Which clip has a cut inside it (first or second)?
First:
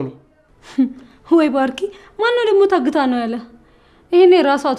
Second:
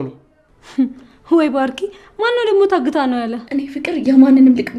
second